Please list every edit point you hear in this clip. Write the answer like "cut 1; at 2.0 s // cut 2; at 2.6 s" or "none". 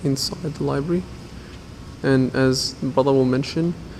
none

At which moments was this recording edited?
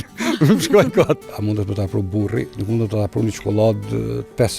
cut 1; at 1.3 s // cut 2; at 2.5 s

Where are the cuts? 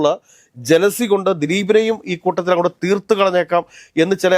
none

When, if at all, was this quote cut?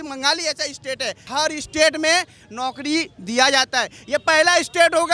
cut 1; at 1.3 s

